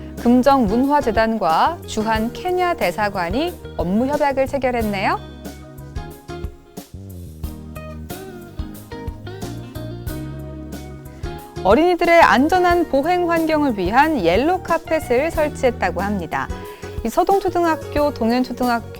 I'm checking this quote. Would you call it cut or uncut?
cut